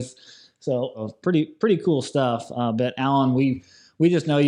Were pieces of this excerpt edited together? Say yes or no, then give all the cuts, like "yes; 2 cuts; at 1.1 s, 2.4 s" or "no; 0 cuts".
yes; 1 cut; at 1.0 s